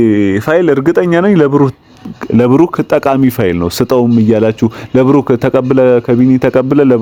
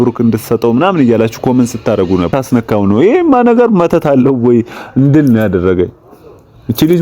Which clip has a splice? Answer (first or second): second